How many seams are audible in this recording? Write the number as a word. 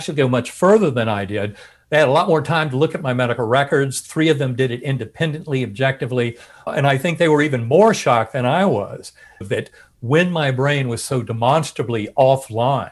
two